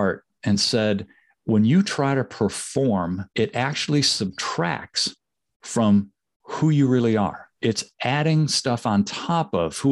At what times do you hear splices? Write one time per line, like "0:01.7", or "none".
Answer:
0:03.3
0:07.5